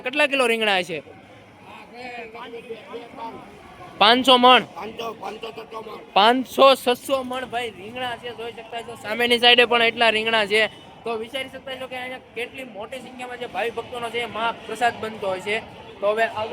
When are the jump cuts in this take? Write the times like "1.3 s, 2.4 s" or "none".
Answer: none